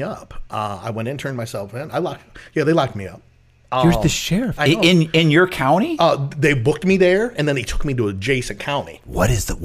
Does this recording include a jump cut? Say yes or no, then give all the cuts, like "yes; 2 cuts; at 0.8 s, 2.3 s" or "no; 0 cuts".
no; 0 cuts